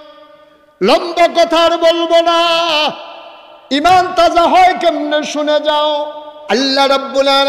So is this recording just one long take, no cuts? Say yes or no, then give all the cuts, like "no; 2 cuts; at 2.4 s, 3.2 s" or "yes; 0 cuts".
no; 1 cut; at 6.6 s